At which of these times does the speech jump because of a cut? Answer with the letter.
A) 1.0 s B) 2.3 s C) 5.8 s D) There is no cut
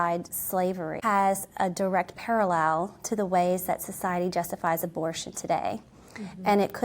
A